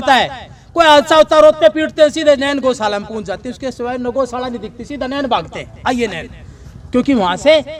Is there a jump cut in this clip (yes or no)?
no